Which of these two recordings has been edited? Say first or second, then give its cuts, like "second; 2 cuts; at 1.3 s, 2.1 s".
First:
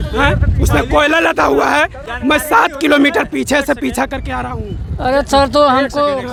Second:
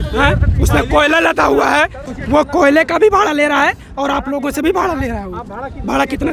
second; 1 cut; at 2.0 s